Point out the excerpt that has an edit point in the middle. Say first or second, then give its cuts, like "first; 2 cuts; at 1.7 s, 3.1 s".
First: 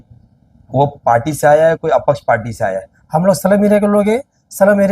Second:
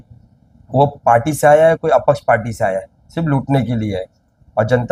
first; 1 cut; at 2.9 s